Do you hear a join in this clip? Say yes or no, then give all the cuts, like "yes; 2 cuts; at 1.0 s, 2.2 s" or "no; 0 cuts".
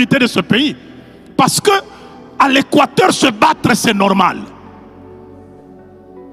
no; 0 cuts